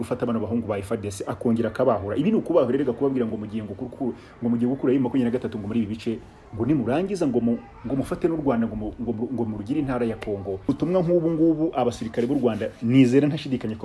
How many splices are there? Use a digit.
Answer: 1